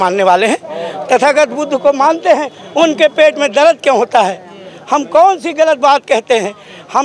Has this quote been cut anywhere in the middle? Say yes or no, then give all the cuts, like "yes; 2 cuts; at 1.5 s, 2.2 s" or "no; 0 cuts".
no; 0 cuts